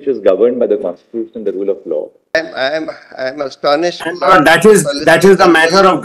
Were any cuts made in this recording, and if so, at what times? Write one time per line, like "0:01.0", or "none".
0:02.3